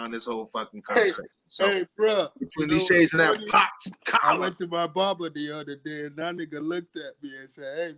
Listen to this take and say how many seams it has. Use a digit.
0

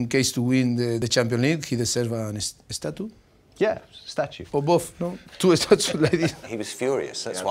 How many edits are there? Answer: 3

